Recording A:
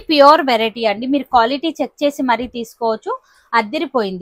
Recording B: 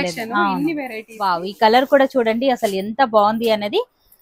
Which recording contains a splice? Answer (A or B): B